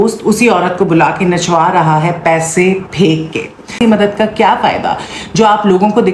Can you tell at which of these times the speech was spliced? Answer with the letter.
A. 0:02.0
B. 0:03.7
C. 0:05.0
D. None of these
B